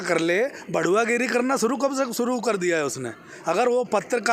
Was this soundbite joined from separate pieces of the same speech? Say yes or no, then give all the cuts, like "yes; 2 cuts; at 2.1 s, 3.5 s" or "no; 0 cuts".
no; 0 cuts